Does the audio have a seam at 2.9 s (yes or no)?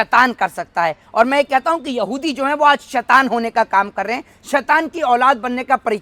no